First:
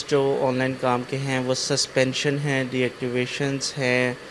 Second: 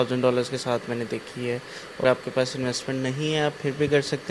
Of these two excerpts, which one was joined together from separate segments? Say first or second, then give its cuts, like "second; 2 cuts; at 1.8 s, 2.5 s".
second; 1 cut; at 2.0 s